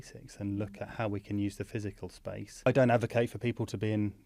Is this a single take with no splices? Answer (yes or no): no